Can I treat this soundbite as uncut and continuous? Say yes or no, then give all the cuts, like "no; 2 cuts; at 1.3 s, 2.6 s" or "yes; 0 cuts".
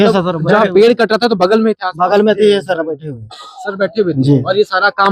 yes; 0 cuts